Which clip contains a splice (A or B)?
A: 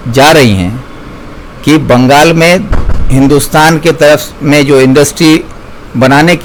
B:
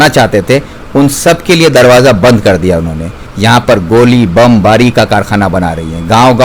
B